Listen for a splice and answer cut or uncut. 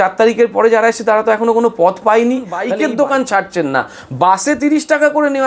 cut